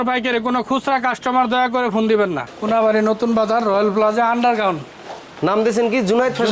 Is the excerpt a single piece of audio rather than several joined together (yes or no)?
no